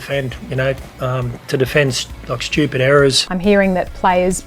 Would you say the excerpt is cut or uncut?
cut